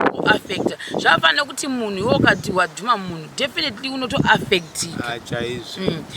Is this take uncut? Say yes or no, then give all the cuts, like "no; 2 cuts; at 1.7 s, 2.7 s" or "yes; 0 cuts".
yes; 0 cuts